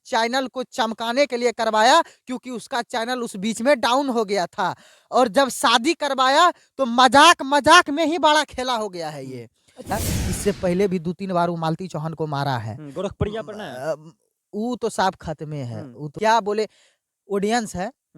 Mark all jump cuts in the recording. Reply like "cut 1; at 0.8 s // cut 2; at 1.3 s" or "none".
cut 1; at 9.9 s // cut 2; at 16.2 s